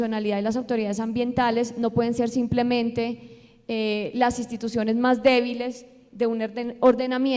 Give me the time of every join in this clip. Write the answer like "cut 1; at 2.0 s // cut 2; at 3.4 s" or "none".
cut 1; at 4.7 s